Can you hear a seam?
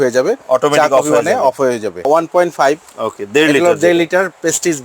yes; 1 cut; at 2.1 s

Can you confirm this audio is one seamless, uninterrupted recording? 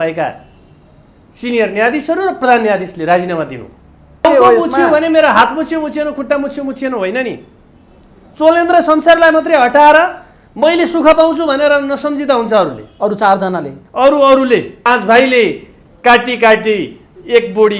no; 2 cuts; at 4.2 s, 14.9 s

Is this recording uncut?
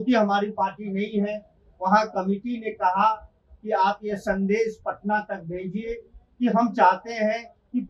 yes; 0 cuts

